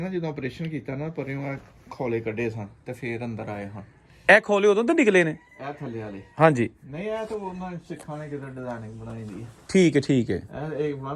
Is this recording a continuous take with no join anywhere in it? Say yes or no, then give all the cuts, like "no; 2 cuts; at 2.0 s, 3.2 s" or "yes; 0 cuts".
yes; 0 cuts